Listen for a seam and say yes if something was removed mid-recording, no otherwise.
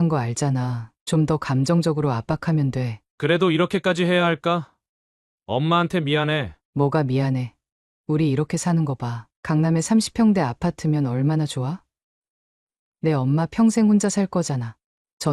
no